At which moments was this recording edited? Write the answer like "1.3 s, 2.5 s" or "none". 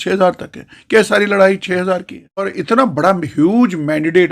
2.6 s